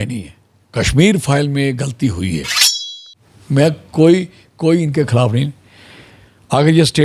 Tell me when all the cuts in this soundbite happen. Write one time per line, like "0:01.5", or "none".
0:02.7